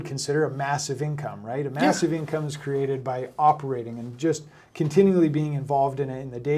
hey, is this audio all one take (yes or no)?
yes